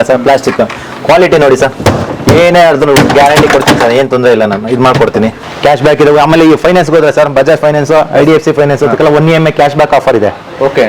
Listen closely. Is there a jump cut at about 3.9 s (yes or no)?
no